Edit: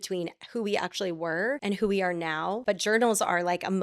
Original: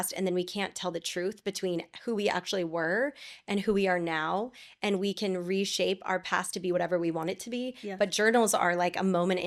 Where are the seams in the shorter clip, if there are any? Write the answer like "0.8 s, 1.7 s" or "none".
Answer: 1.6 s, 2.6 s